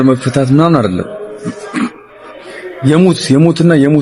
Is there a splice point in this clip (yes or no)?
no